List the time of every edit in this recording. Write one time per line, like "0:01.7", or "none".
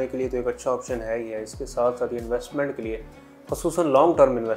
none

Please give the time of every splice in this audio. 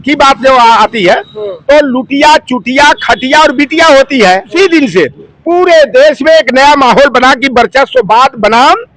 0:04.5

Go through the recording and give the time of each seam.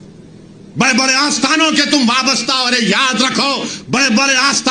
none

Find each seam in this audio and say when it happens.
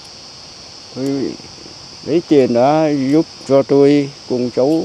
none

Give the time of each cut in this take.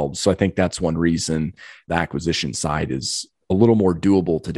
0:01.9

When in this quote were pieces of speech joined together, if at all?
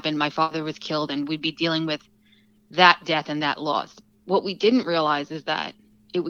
none

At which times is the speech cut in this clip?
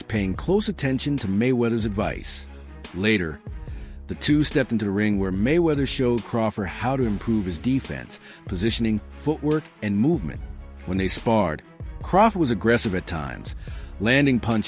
none

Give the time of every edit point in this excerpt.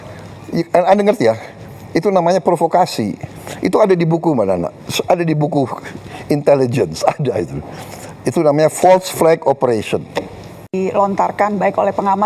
0:10.7

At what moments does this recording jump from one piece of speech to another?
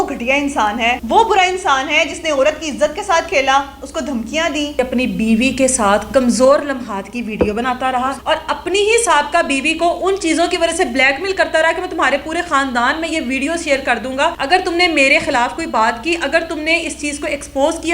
0:01.0
0:04.8
0:08.2
0:14.4

